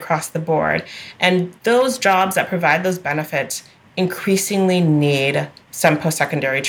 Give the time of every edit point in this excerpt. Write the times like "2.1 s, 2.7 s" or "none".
none